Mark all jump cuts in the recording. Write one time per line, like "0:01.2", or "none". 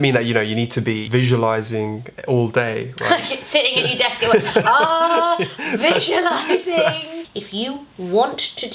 0:01.0
0:07.2